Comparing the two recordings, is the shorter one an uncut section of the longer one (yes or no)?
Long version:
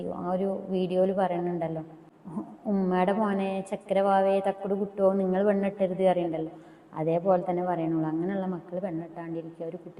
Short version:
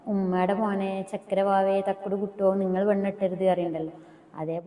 yes